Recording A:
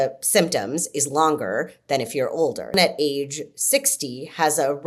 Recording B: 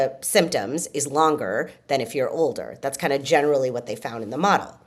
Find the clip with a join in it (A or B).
A